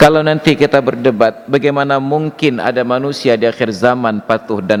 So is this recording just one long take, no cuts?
yes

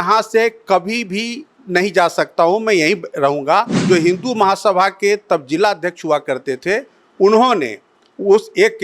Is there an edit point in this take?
yes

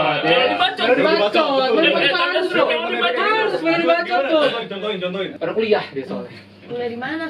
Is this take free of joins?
no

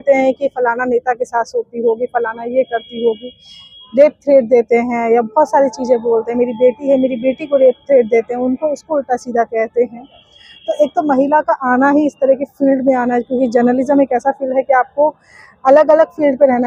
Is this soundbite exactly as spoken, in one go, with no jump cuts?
yes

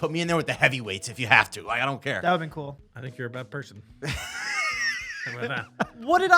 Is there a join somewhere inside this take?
yes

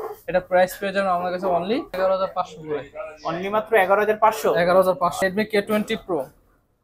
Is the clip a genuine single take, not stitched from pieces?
no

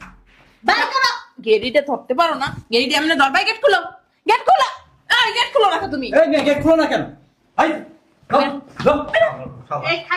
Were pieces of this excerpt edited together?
no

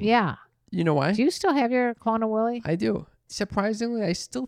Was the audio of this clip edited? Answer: yes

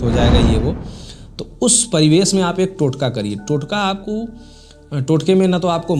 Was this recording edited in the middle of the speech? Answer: no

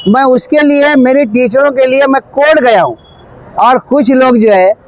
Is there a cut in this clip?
no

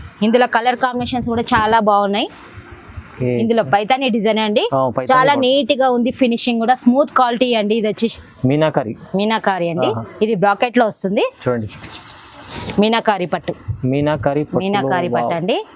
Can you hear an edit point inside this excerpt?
yes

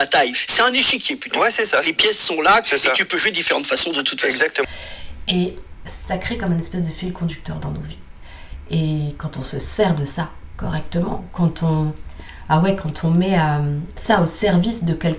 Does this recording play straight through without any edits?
no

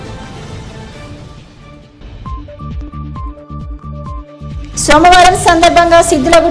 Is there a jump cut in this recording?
yes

